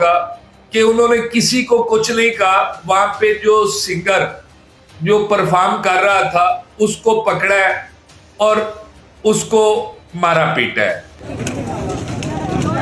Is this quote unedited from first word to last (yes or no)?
no